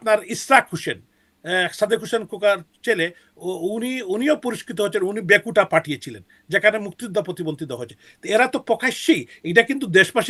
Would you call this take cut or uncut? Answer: uncut